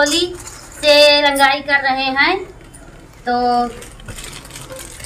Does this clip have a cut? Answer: no; 0 cuts

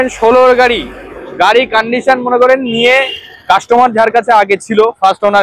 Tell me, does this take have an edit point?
no; 0 cuts

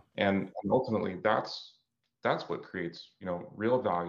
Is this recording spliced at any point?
yes; 1 cut; at 3.1 s

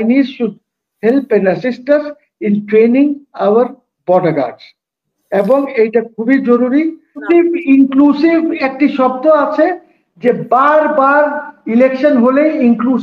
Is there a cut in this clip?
yes; 1 cut; at 7.2 s

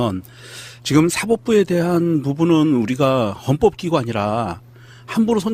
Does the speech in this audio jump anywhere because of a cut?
yes; 1 cut; at 3.0 s

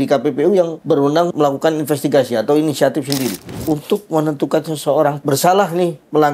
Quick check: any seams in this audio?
yes; 3 cuts; at 1.2 s, 3.5 s, 5.2 s

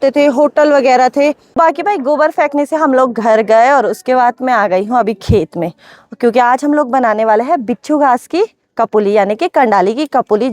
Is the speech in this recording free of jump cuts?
no; 1 cut; at 1.6 s

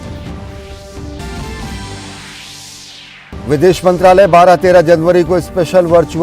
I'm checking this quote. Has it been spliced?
yes; 1 cut; at 1.1 s

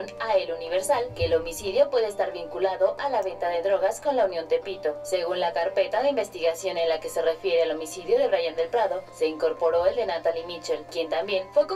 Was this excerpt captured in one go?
yes; 0 cuts

